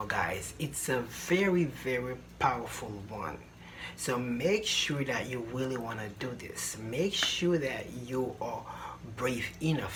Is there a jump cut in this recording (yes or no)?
no